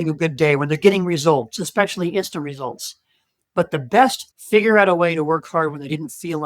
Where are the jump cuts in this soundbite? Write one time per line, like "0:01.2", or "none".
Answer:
0:04.2